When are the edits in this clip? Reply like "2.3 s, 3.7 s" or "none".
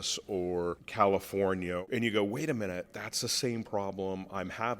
0.8 s, 1.8 s, 2.9 s